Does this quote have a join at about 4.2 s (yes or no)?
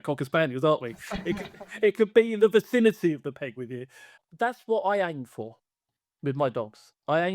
yes